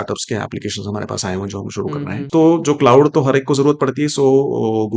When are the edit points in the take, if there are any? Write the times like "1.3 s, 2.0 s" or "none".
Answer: 2.2 s